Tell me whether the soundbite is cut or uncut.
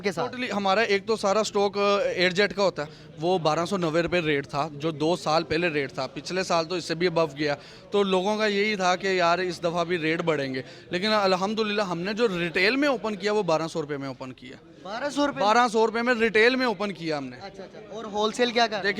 cut